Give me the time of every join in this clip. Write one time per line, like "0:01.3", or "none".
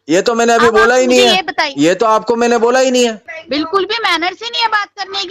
0:03.3